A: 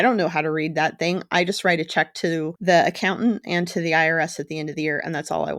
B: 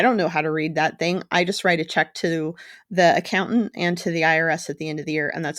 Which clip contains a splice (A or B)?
A